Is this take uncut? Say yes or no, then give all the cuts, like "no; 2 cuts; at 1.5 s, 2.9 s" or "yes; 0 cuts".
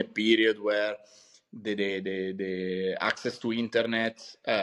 yes; 0 cuts